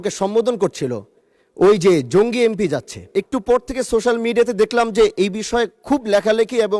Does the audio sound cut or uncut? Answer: cut